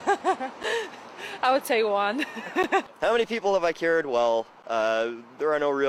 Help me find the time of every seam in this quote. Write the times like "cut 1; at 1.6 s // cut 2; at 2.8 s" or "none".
none